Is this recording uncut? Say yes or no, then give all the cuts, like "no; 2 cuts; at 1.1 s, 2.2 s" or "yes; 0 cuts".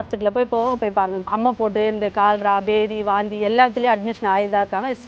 no; 1 cut; at 1.2 s